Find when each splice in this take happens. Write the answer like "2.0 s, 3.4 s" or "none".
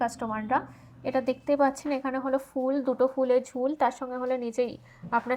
none